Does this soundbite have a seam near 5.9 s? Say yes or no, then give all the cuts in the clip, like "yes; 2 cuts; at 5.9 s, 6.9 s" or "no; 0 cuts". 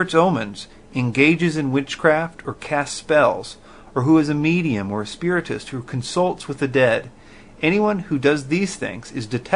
no; 1 cut; at 8.6 s